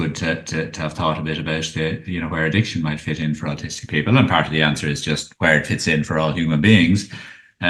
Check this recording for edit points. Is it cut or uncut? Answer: uncut